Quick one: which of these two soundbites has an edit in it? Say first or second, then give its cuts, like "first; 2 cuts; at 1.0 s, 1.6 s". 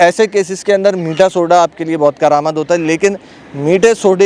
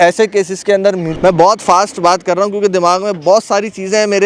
second; 1 cut; at 1.1 s